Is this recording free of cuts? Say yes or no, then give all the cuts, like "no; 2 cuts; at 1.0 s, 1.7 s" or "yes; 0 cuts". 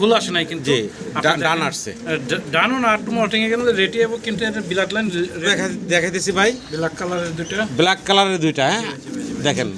no; 1 cut; at 5.4 s